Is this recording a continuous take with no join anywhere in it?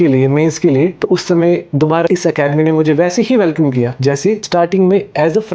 no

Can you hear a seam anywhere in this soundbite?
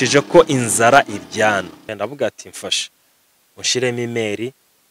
yes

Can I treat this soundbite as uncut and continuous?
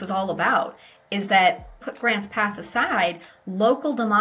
no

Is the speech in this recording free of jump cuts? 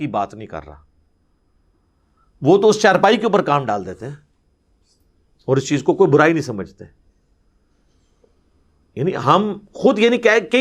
yes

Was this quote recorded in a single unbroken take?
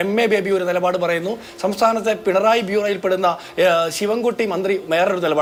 yes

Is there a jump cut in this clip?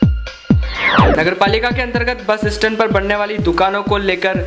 yes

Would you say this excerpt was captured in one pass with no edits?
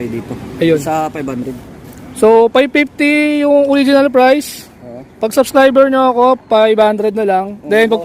yes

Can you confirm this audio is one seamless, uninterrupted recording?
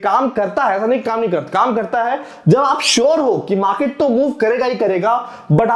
yes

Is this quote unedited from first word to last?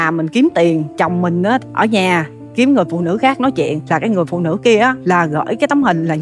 no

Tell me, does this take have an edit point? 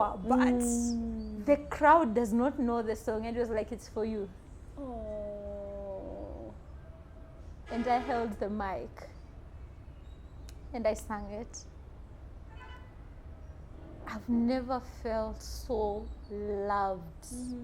no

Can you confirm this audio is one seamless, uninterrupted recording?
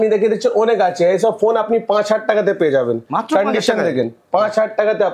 yes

